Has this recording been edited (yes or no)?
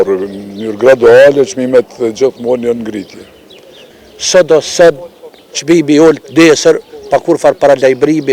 yes